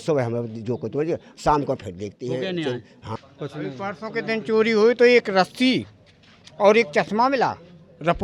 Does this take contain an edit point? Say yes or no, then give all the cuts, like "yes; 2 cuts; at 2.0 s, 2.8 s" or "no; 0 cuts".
yes; 1 cut; at 3.0 s